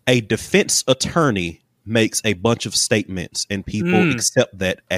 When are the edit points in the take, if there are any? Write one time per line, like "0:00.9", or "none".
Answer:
none